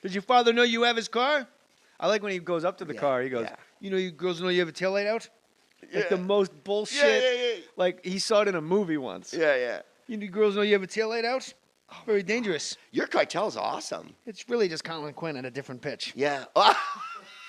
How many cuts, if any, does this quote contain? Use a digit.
0